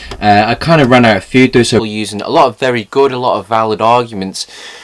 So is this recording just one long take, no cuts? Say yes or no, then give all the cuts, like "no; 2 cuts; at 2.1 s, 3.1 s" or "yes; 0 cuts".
yes; 0 cuts